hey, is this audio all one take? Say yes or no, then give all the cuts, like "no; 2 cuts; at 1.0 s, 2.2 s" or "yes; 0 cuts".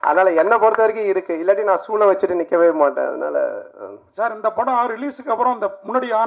yes; 0 cuts